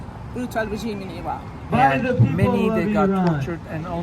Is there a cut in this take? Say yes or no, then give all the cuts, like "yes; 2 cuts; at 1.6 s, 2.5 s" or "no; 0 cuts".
yes; 1 cut; at 1.7 s